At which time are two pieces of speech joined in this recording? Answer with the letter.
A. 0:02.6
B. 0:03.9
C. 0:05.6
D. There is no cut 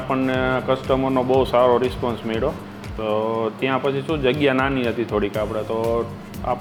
D